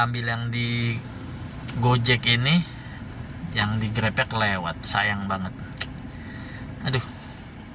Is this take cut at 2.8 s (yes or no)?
no